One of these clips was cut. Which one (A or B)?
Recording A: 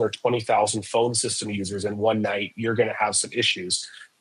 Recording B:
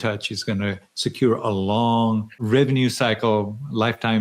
B